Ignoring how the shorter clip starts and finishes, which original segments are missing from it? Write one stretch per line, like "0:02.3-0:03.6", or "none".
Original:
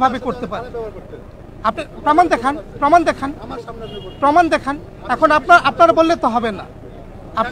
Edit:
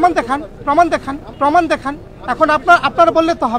0:03.3-0:04.0